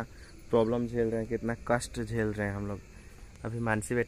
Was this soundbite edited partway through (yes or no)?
no